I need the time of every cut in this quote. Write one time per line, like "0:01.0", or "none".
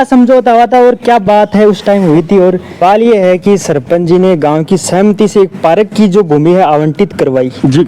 0:02.8